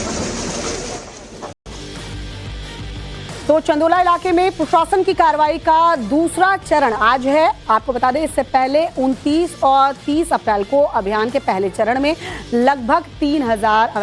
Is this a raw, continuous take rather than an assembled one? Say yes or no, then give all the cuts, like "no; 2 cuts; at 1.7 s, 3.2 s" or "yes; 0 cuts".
yes; 0 cuts